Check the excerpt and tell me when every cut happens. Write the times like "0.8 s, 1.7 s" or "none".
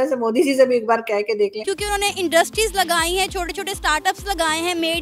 1.6 s